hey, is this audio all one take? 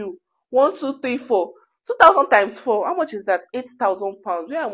yes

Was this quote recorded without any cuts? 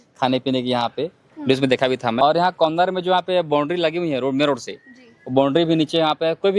no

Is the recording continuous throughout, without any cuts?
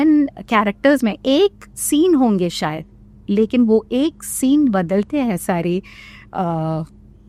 yes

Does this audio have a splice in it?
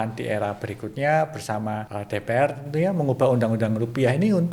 yes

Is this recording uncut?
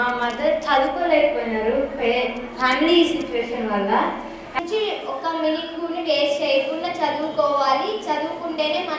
no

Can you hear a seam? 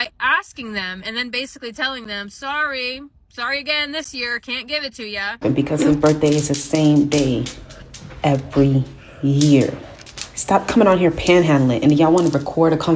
yes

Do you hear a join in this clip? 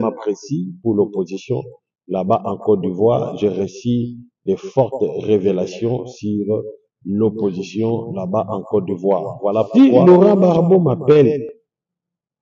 yes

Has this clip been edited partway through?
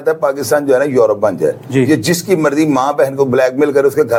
no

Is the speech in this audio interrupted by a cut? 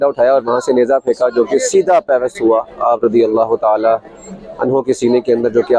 no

